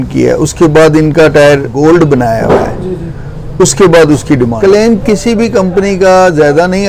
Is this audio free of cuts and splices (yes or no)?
no